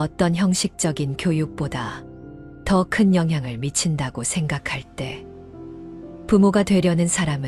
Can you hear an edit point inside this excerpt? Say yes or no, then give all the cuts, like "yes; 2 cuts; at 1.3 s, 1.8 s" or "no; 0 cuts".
yes; 2 cuts; at 5.1 s, 6.3 s